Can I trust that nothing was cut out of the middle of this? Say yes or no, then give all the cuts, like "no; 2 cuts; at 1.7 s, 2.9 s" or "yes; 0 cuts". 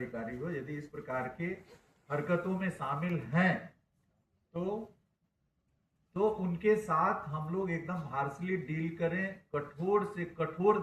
yes; 0 cuts